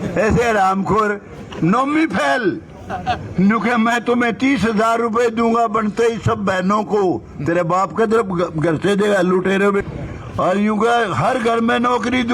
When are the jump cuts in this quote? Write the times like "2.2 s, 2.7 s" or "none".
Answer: 9.7 s